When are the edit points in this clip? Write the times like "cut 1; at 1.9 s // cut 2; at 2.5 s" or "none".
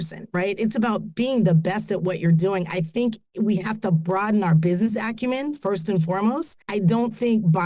cut 1; at 6.5 s